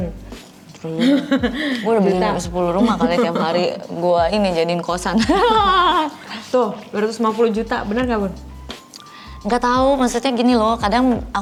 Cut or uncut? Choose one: uncut